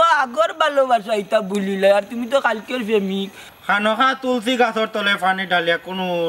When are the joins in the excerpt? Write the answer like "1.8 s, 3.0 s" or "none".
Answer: 3.4 s